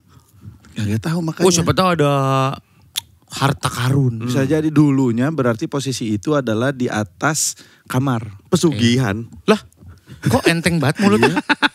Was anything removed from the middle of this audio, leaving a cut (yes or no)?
no